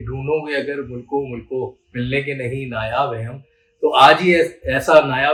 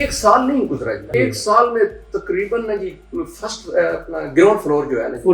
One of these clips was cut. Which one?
second; 1 cut; at 1.1 s

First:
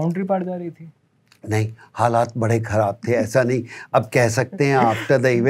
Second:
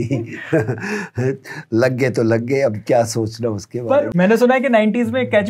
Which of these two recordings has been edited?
second; 1 cut; at 4.1 s

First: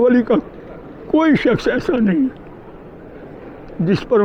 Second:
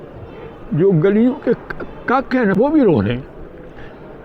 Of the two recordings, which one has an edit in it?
second; 1 cut; at 2.5 s

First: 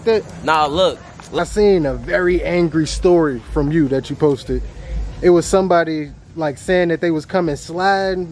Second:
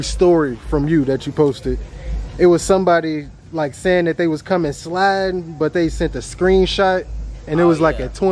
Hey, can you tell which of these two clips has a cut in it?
first; 1 cut; at 1.3 s

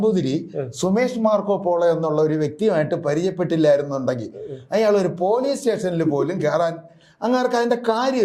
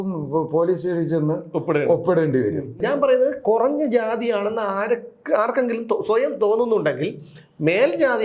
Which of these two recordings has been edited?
second; 1 cut; at 2.8 s

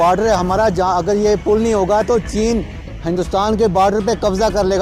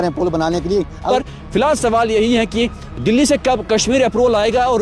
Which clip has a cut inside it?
second; 1 cut; at 1.1 s

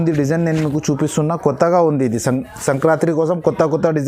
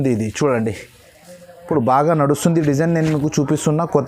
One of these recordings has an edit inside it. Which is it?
second; 1 cut; at 1.5 s

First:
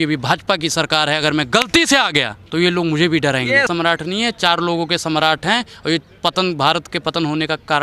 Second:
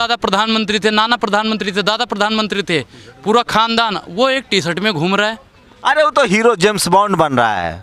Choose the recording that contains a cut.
first; 2 cuts; at 2.4 s, 3.7 s

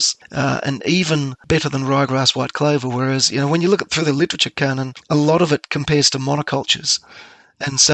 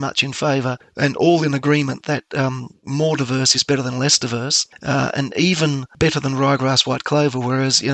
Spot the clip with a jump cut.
first; 1 cut; at 4.9 s

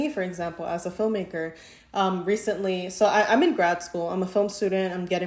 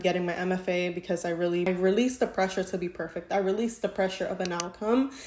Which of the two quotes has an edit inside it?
second; 1 cut; at 1.7 s

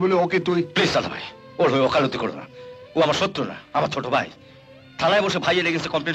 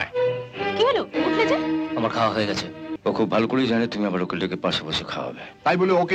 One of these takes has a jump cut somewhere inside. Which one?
second; 1 cut; at 2.9 s

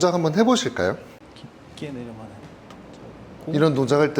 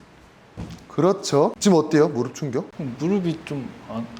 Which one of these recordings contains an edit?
first; 1 cut; at 1.2 s

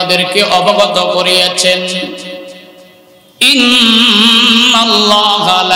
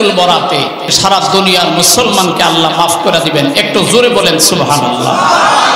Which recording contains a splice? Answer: second; 1 cut; at 0.9 s

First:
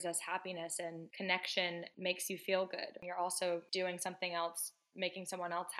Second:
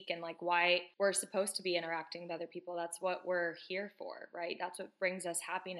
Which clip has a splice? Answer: first; 2 cuts; at 1.9 s, 3.0 s

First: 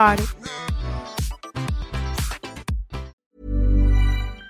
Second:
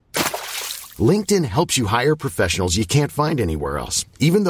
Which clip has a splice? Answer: first; 1 cut; at 3.3 s

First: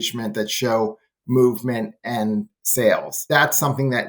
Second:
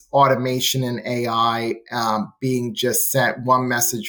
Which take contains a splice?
first; 1 cut; at 3.2 s

